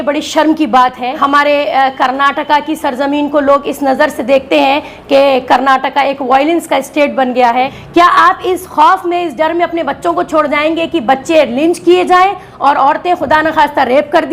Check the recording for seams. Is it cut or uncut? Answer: cut